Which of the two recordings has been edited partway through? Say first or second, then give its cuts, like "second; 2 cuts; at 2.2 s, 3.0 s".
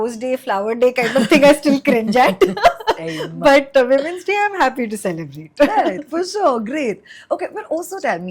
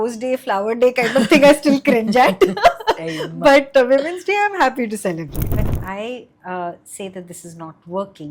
second; 1 cut; at 5.4 s